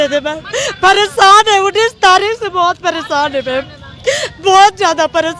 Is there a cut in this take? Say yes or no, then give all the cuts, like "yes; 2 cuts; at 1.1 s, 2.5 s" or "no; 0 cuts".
no; 0 cuts